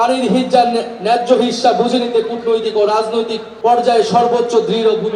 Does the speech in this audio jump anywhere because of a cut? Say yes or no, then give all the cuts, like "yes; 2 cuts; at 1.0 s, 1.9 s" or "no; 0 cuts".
yes; 1 cut; at 3.4 s